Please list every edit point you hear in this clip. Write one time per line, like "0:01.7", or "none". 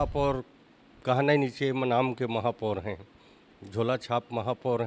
none